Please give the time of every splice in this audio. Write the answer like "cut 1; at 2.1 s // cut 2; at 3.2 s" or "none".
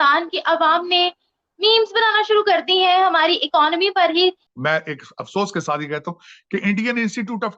cut 1; at 4.5 s

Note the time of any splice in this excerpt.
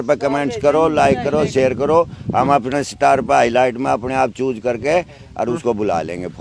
none

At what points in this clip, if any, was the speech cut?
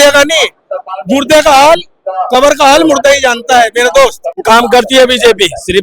cut 1; at 4.4 s

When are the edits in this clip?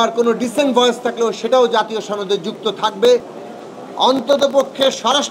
cut 1; at 3.4 s

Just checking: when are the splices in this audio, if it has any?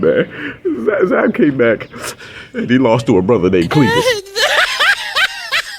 cut 1; at 4.1 s

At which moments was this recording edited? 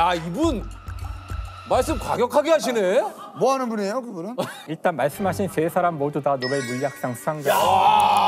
cut 1; at 4.7 s

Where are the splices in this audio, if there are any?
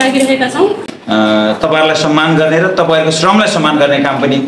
cut 1; at 0.9 s

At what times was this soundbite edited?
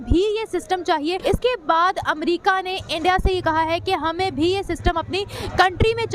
cut 1; at 1.2 s

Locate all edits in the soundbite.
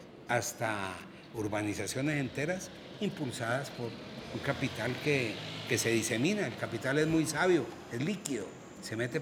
none

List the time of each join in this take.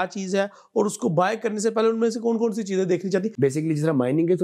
cut 1; at 3.3 s

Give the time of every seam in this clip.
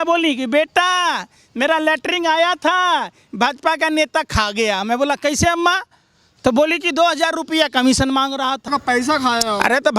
cut 1; at 8.7 s

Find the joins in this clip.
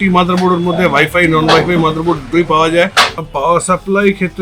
cut 1; at 3.3 s

